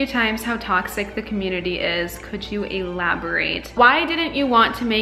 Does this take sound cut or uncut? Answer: cut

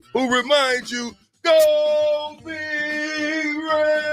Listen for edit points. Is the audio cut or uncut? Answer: uncut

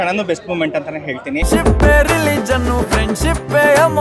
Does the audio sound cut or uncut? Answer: cut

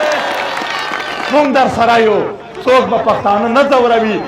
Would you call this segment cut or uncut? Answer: cut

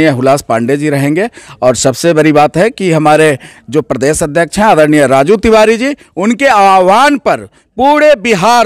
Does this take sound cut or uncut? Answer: uncut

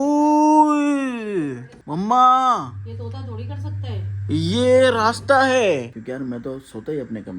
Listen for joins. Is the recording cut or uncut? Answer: cut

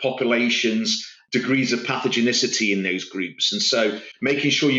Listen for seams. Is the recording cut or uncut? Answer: cut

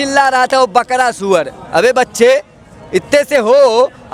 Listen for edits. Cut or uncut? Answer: uncut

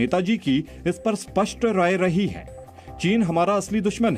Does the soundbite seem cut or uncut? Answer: uncut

